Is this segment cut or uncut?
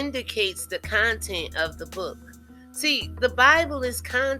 uncut